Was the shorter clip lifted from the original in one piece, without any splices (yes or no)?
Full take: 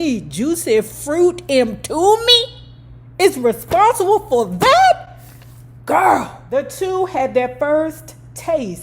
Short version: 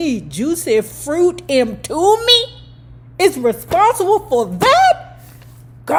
yes